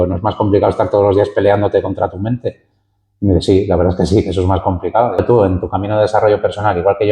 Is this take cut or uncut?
cut